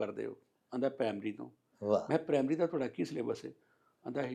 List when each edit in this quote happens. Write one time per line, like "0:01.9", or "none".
none